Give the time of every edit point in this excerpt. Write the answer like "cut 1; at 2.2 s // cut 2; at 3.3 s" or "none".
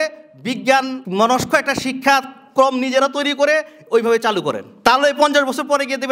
none